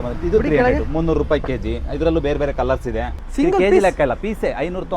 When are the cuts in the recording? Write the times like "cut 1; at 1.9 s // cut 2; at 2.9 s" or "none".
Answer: cut 1; at 3.2 s